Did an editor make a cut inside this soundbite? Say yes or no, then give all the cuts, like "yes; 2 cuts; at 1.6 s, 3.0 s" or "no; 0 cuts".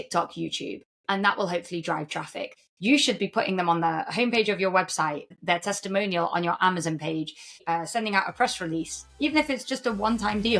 yes; 3 cuts; at 2.6 s, 5.3 s, 7.6 s